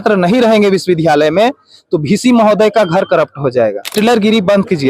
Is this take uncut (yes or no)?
no